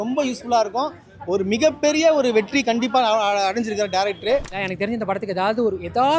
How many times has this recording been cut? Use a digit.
1